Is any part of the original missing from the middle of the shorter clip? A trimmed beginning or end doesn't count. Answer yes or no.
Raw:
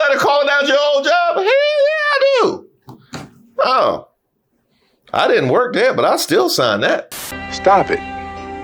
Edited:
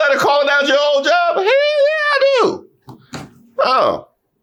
no